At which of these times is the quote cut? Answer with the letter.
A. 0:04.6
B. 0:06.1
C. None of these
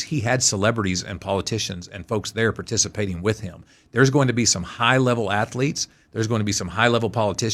C